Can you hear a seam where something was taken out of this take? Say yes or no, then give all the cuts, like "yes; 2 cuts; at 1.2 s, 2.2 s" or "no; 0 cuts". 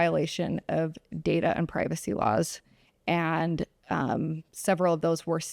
no; 0 cuts